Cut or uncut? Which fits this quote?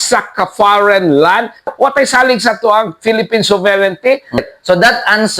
cut